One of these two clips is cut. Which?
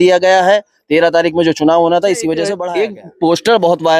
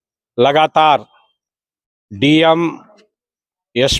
first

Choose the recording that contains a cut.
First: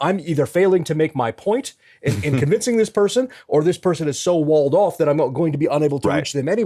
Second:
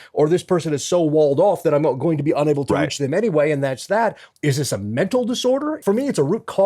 second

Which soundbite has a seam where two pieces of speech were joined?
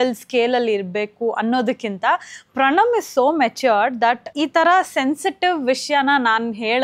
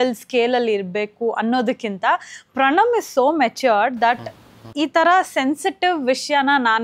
first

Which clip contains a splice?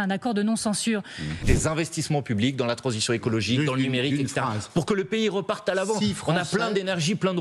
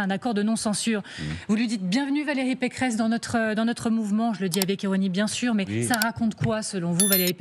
first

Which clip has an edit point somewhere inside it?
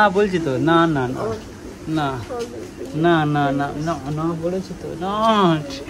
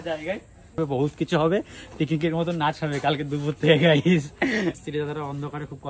second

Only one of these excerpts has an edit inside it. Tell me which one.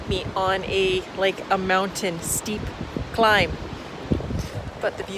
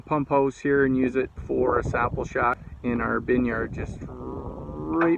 second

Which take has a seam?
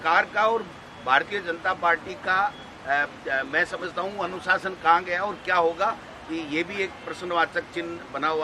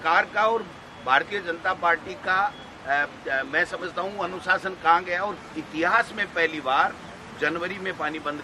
second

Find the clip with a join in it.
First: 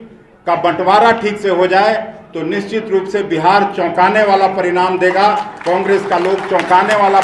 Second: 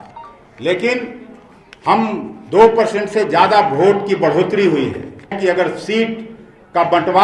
second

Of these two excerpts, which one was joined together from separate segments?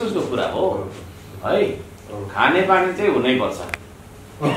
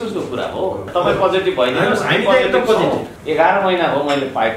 second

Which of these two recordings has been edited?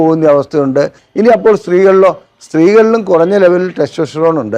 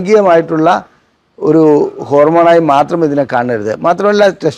first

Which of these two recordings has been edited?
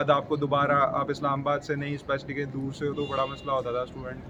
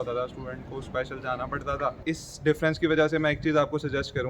second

